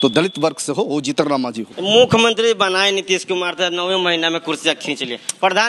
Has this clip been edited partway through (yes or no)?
yes